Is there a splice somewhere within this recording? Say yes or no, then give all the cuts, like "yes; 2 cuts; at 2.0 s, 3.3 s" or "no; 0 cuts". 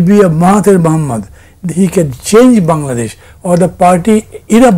no; 0 cuts